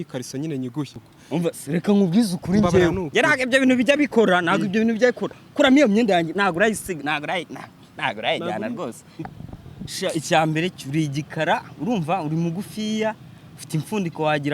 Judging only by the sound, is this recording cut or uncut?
cut